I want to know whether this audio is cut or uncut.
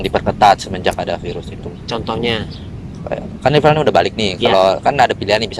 uncut